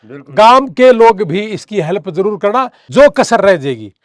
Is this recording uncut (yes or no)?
no